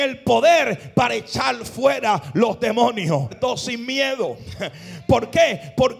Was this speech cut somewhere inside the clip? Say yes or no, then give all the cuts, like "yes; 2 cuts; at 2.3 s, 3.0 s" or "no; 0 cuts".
yes; 1 cut; at 3.3 s